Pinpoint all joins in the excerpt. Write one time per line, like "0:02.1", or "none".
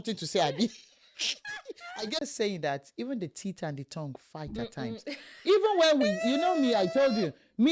0:02.2

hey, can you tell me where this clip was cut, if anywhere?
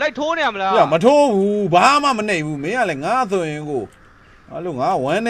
none

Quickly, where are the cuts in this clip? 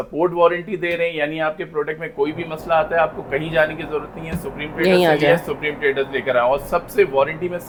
none

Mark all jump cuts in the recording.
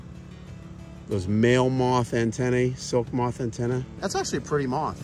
0:03.9

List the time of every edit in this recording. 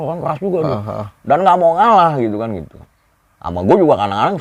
none

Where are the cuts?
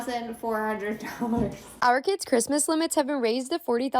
0:01.6

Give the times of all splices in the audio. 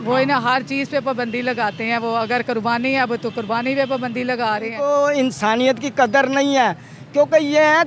0:04.7

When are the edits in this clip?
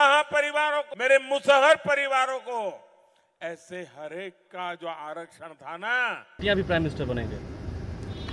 0:00.9
0:06.4

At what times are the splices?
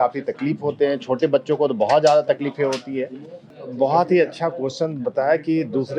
0:03.5

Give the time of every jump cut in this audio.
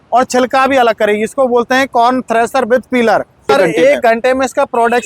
0:03.5

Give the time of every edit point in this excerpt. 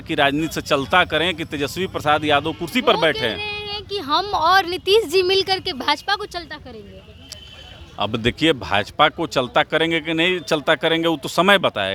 none

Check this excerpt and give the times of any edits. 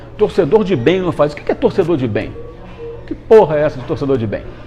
none

